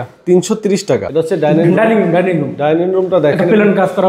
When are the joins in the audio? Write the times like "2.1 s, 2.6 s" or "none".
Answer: 1.1 s

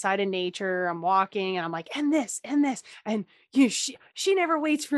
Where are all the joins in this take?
2.9 s

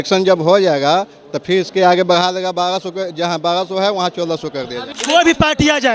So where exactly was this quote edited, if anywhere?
4.9 s

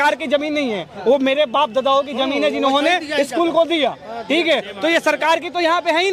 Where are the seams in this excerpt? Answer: none

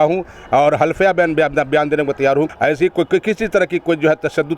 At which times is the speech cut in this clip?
2.5 s

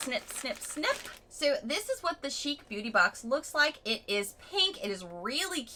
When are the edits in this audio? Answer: none

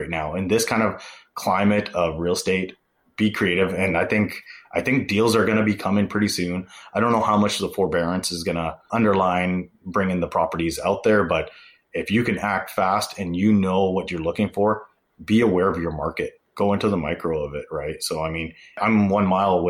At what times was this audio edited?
none

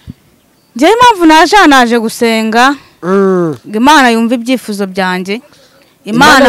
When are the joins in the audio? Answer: none

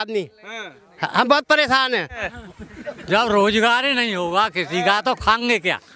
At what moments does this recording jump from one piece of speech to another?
2.3 s

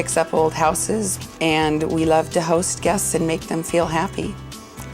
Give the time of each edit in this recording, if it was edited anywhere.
1.1 s

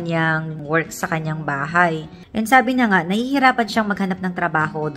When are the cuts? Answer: 2.2 s

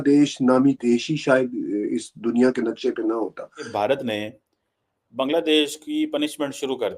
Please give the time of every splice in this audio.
3.7 s

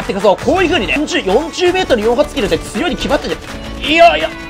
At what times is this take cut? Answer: 1.0 s

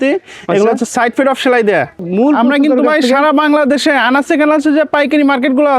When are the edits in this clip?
2.0 s

